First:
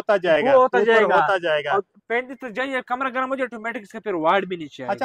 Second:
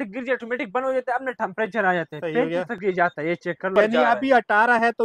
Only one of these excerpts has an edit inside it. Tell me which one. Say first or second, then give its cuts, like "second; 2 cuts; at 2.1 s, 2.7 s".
second; 1 cut; at 3.7 s